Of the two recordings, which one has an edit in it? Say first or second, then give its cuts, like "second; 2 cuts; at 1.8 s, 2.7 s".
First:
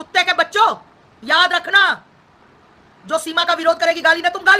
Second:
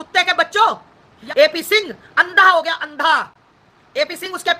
second; 1 cut; at 1.2 s